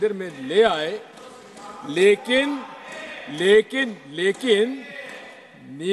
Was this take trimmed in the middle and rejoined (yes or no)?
no